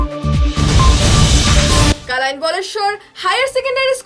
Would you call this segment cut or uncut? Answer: cut